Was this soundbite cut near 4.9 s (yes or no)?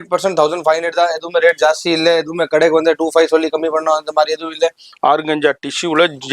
yes